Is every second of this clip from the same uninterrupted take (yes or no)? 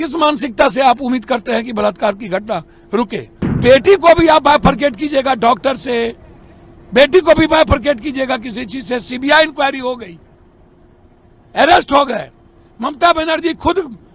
no